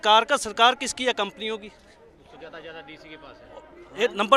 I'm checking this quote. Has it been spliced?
no; 0 cuts

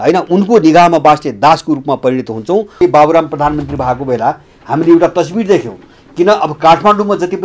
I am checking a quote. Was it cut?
yes; 1 cut; at 2.8 s

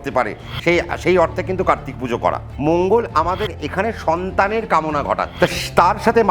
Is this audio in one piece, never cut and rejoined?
no; 2 cuts; at 2.5 s, 5.3 s

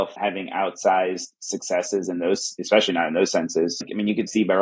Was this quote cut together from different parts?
yes; 2 cuts; at 2.5 s, 3.8 s

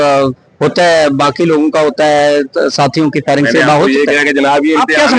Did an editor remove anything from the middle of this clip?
no; 0 cuts

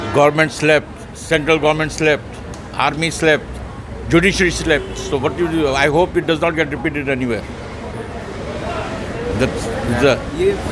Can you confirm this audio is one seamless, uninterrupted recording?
yes; 0 cuts

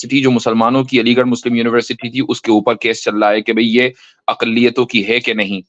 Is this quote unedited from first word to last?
yes; 0 cuts

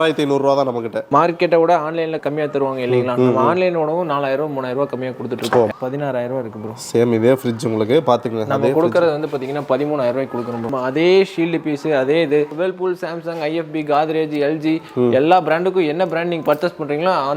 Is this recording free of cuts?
no; 5 cuts; at 1.0 s, 2.2 s, 5.7 s, 10.6 s, 12.5 s

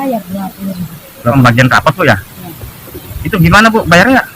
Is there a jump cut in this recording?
yes; 1 cut; at 1.3 s

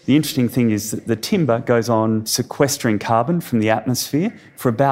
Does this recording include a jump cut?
yes; 2 cuts; at 0.7 s, 2.4 s

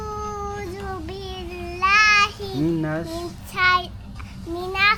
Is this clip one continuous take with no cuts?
yes; 0 cuts

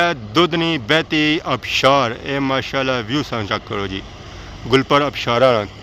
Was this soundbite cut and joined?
no; 0 cuts

